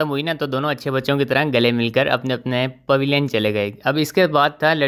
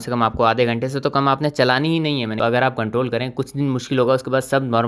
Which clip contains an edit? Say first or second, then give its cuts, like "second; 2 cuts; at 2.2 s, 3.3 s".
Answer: second; 1 cut; at 2.4 s